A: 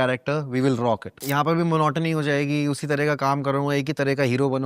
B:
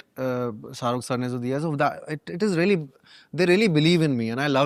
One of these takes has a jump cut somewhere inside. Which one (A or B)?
A